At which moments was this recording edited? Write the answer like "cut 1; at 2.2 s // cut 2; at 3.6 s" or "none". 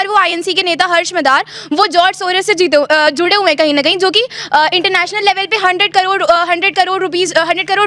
none